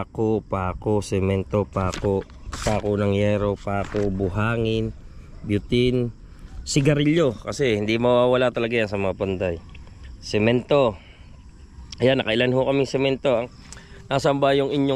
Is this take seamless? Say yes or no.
no